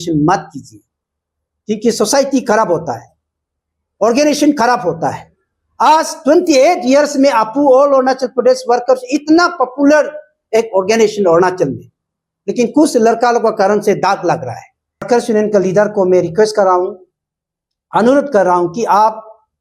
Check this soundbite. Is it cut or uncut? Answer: cut